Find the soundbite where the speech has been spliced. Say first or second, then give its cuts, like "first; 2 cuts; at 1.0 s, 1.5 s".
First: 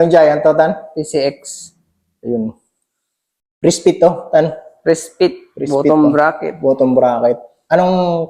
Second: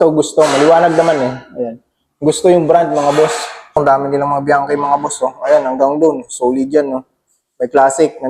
second; 1 cut; at 3.8 s